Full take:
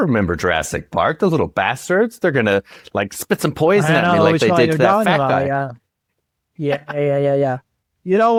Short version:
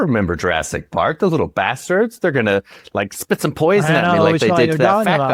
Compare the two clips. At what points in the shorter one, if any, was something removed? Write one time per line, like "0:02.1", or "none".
none